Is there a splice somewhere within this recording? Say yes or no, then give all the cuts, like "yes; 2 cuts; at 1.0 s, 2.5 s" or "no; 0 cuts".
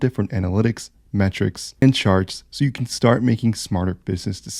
yes; 1 cut; at 1.8 s